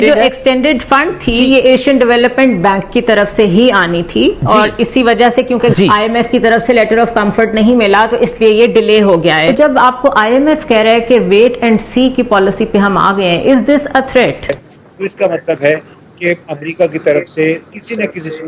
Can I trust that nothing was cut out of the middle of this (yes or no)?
no